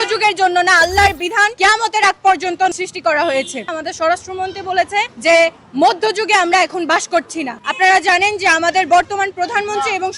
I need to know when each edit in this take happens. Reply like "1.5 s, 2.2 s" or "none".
1.5 s, 2.7 s, 3.7 s, 5.1 s, 7.6 s